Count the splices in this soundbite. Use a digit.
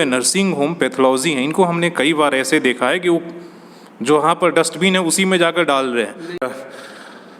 1